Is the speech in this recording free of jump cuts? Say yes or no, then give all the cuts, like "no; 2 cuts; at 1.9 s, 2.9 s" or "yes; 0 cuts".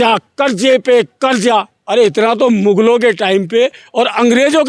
yes; 0 cuts